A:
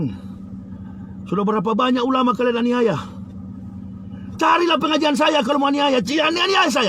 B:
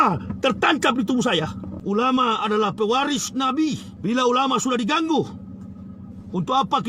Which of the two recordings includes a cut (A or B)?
B